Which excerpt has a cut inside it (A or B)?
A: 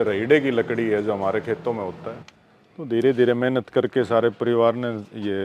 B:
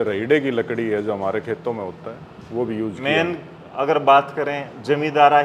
A